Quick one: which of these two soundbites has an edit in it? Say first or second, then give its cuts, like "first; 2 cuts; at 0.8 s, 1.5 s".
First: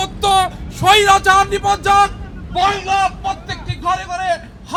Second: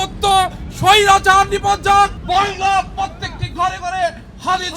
second; 1 cut; at 2.2 s